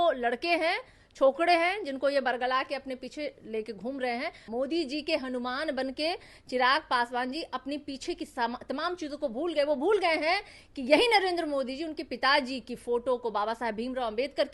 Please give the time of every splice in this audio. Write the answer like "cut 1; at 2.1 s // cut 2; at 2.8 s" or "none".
cut 1; at 4.4 s

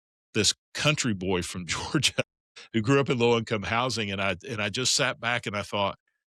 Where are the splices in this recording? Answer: none

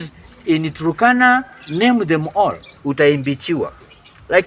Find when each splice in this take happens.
cut 1; at 2.7 s

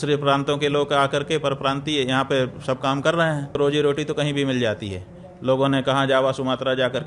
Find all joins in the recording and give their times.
cut 1; at 3.6 s

